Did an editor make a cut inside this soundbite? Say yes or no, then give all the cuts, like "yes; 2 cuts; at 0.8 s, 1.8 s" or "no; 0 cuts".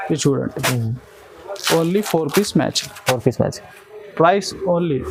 no; 0 cuts